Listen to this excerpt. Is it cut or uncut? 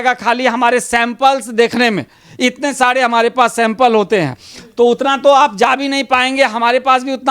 uncut